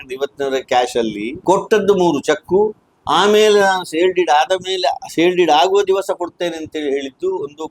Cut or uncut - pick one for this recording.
cut